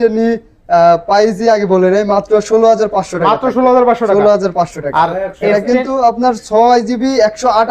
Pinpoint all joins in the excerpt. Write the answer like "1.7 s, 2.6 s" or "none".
none